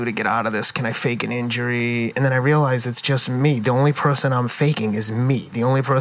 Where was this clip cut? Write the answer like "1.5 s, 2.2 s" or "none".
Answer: none